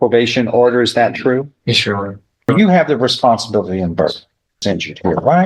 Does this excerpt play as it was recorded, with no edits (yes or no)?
no